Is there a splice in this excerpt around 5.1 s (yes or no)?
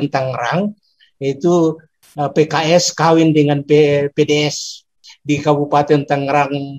yes